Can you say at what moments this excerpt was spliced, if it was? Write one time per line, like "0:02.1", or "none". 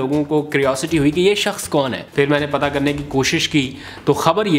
0:02.0